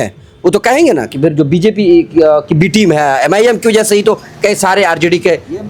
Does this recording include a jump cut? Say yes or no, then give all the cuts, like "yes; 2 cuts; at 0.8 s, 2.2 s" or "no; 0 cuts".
no; 0 cuts